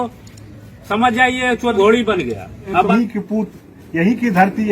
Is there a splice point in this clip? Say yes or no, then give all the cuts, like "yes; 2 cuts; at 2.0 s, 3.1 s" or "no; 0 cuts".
yes; 2 cuts; at 1.6 s, 2.9 s